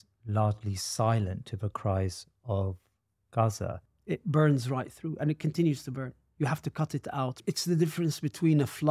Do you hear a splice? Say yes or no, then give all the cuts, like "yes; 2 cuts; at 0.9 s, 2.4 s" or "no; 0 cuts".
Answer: yes; 2 cuts; at 3.9 s, 7.4 s